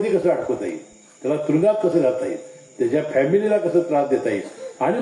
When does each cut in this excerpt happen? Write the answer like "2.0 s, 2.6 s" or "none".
none